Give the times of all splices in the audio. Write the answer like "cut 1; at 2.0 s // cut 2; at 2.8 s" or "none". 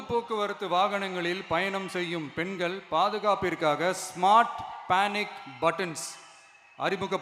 none